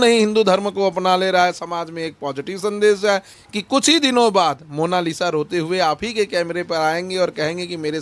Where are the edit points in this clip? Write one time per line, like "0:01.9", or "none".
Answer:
0:03.3